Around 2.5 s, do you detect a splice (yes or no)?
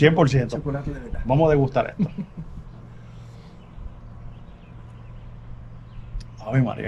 no